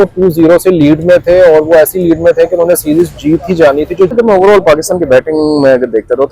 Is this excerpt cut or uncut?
cut